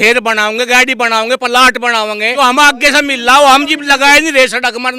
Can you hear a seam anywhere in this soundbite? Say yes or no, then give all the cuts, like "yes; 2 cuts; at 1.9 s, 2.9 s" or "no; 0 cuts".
yes; 1 cut; at 2.3 s